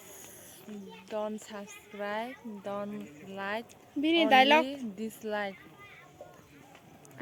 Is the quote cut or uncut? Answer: uncut